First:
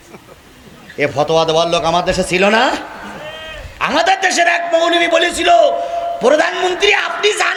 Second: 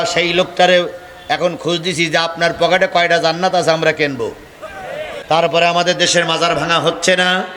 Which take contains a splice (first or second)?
second